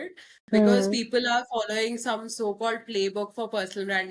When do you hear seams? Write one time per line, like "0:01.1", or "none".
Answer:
none

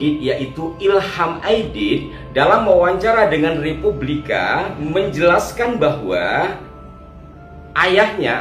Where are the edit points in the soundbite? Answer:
0:04.8

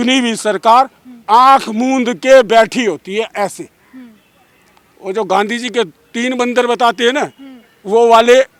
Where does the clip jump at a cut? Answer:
none

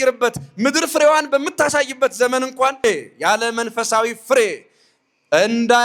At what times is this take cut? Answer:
0:02.8

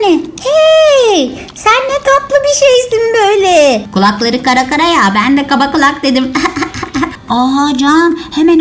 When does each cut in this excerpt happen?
0:03.9
0:07.1

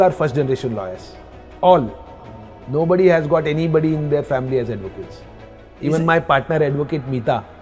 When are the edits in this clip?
0:05.6

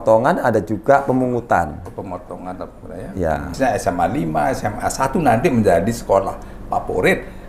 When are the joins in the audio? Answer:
0:03.5

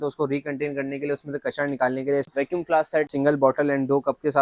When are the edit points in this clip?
0:02.3
0:03.1

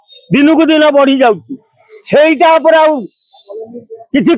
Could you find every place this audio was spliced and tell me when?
none

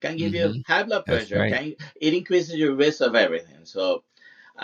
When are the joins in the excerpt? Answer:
none

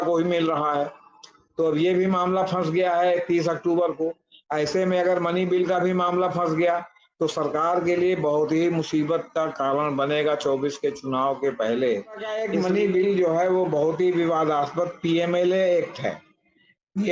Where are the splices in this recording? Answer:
0:12.4

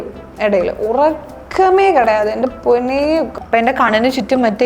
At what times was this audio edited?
0:03.4

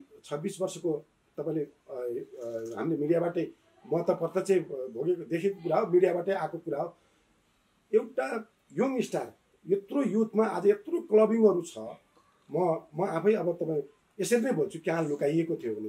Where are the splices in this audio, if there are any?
none

